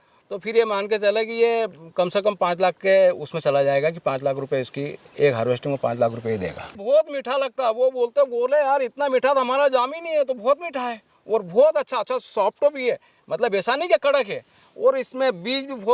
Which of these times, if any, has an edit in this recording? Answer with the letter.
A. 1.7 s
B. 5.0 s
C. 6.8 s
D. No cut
C